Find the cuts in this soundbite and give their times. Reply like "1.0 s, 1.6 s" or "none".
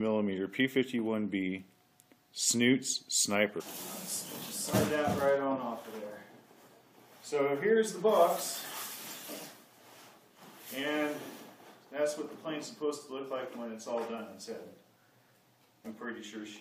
none